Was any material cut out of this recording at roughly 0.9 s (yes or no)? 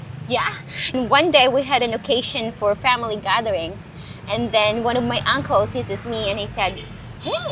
yes